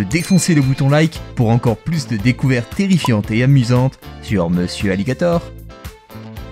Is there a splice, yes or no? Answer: yes